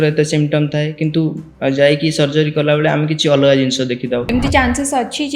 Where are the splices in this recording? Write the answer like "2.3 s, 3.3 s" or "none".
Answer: 4.2 s